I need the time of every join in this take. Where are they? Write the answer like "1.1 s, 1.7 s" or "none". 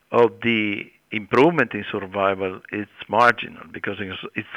1.1 s, 2.9 s